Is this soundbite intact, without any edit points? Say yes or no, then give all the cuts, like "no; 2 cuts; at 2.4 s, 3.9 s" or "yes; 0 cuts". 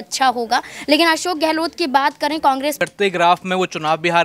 no; 1 cut; at 2.8 s